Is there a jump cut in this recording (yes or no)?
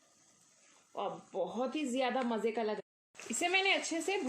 yes